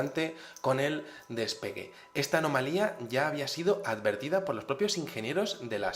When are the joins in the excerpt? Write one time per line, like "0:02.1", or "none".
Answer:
0:01.4